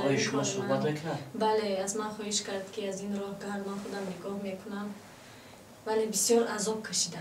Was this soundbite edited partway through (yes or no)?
no